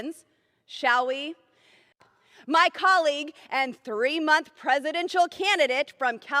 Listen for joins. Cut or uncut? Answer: cut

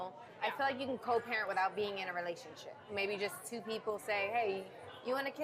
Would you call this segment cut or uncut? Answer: uncut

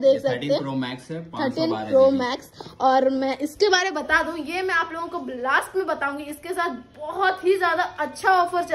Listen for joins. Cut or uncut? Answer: uncut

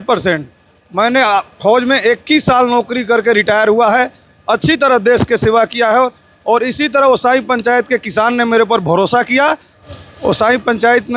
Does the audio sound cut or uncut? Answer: cut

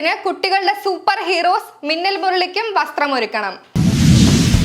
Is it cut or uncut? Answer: cut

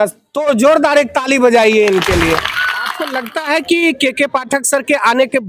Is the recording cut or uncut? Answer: cut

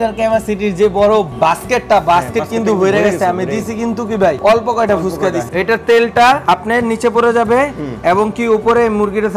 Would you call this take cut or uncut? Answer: cut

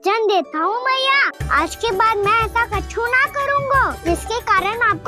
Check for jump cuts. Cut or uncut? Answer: cut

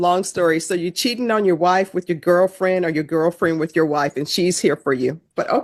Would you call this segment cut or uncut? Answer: uncut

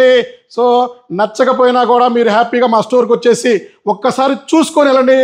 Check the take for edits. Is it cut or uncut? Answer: uncut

